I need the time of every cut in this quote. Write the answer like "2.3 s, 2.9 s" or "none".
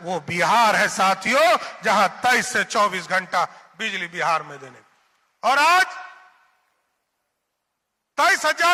none